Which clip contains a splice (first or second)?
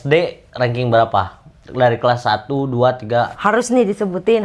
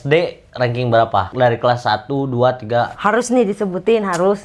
second